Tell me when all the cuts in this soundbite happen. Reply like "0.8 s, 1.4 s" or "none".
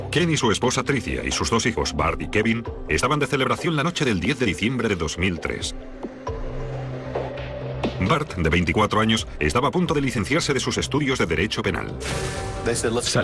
none